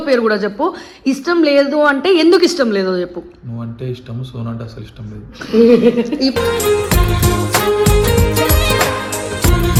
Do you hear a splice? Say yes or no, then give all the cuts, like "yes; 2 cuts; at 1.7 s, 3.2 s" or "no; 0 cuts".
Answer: no; 0 cuts